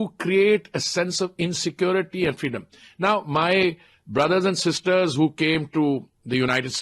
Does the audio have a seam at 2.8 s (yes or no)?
no